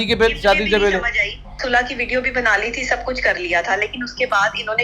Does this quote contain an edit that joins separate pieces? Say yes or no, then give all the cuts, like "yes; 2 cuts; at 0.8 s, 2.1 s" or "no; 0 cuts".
yes; 1 cut; at 1.6 s